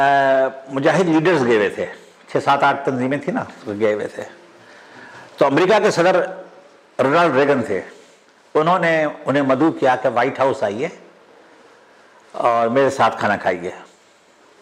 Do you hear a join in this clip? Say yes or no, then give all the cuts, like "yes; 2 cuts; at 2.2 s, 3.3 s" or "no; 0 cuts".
no; 0 cuts